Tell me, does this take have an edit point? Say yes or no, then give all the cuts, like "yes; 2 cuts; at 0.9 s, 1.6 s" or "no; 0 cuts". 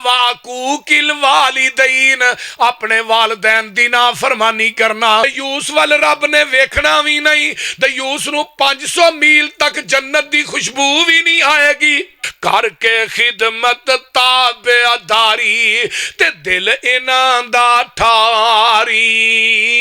yes; 2 cuts; at 5.2 s, 12.2 s